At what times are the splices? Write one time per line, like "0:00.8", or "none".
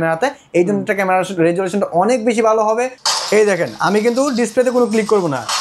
0:03.0